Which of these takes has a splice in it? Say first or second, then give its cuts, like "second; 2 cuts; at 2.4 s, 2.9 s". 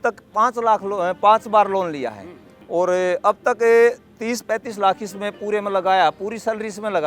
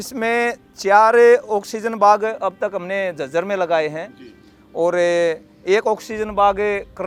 first; 1 cut; at 2.7 s